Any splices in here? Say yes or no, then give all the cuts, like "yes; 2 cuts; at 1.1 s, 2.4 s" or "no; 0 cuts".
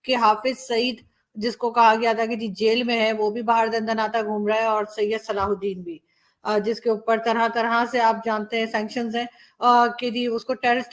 no; 0 cuts